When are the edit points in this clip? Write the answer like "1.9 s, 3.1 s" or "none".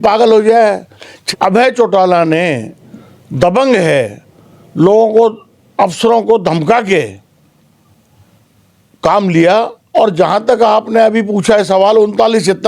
1.2 s, 9.8 s